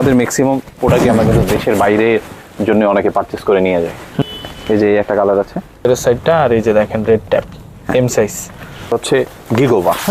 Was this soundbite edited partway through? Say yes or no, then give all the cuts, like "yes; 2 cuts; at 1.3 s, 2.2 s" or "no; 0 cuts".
yes; 3 cuts; at 4.2 s, 5.9 s, 8.9 s